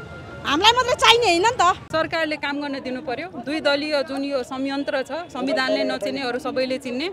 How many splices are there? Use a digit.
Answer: 1